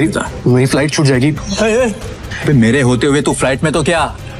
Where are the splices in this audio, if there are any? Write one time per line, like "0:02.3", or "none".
0:01.4
0:02.2